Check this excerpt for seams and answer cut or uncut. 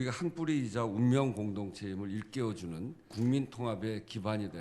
cut